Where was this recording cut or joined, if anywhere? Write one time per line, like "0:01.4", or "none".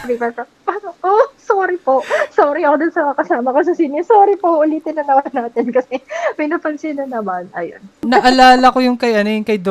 0:08.0